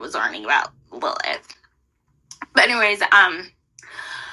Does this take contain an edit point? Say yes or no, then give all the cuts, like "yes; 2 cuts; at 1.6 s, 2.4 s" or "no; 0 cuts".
no; 0 cuts